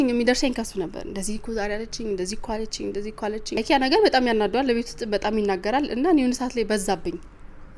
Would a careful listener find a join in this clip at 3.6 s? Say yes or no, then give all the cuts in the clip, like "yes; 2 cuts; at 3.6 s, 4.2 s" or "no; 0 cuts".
yes; 1 cut; at 3.6 s